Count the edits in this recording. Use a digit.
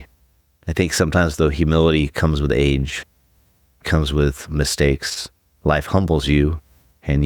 1